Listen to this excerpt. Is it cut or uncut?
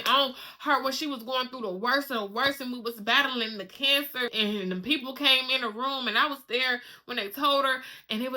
cut